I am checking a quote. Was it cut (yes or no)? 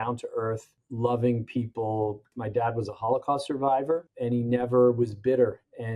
yes